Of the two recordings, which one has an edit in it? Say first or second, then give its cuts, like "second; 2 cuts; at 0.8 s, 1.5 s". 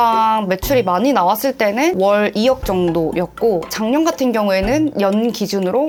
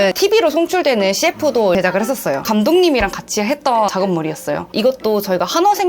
second; 2 cuts; at 2.5 s, 4.7 s